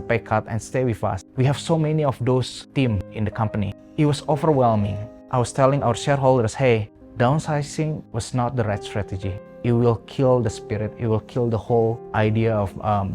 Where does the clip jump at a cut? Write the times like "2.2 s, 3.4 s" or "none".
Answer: none